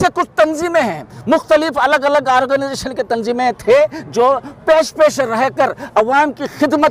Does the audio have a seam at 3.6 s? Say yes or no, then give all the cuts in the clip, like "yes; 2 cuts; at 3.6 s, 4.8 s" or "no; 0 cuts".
no; 0 cuts